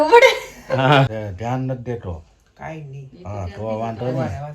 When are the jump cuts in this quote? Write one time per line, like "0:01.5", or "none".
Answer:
0:01.2